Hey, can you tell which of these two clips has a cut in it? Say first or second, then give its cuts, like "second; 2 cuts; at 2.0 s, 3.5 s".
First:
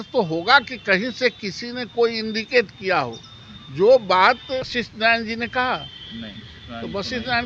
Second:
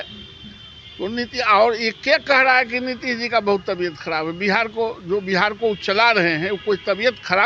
first; 1 cut; at 4.7 s